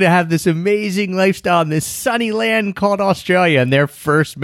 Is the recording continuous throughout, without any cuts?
yes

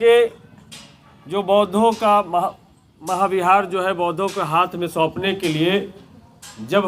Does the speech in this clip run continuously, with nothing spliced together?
yes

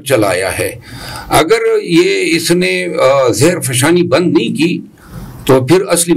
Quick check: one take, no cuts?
yes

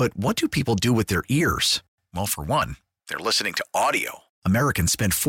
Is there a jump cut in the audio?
no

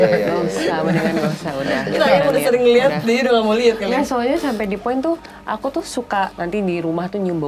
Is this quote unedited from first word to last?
no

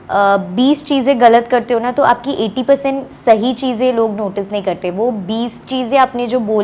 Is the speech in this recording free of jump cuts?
yes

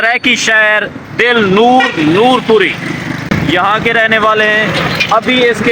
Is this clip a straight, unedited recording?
yes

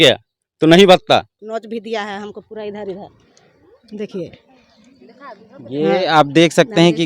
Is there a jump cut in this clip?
yes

